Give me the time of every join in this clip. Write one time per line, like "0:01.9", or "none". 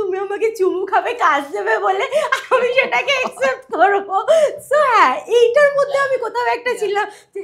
none